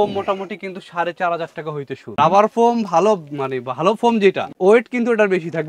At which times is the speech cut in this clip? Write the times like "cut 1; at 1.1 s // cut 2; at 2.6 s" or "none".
cut 1; at 2.1 s // cut 2; at 4.5 s